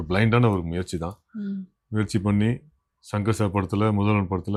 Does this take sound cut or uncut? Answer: uncut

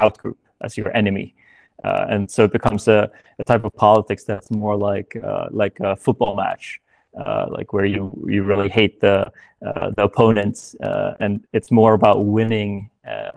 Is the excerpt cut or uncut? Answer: uncut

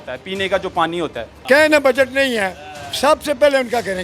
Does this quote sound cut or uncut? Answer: cut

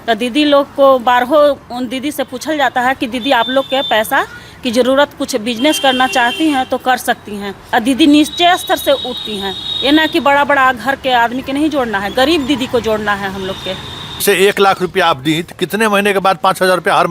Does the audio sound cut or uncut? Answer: cut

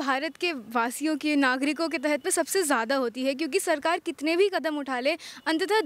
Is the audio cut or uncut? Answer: uncut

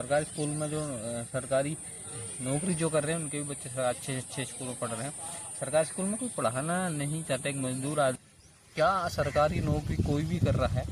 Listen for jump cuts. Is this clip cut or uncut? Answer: cut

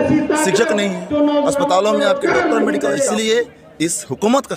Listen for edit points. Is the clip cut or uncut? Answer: cut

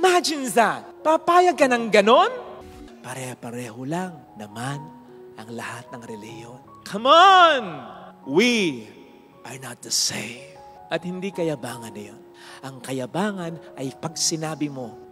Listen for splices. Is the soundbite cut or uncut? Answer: cut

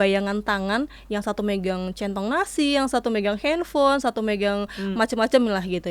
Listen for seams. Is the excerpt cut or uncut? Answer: uncut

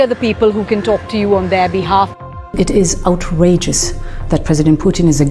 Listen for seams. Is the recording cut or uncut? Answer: cut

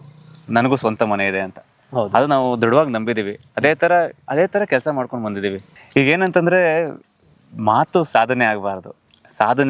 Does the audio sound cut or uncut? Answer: uncut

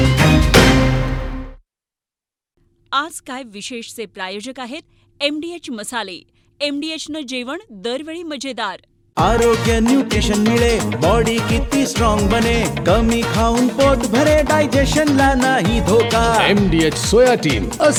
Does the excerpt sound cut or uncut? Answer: uncut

